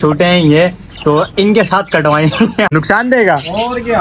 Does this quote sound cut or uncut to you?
cut